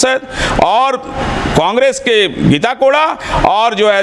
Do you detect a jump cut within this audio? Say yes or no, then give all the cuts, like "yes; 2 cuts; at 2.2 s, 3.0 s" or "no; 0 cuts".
no; 0 cuts